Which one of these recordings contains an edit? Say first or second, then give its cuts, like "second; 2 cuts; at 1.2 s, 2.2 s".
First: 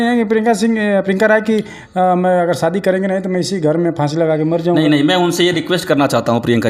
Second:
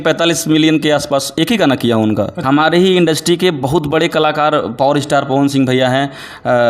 second; 1 cut; at 2.4 s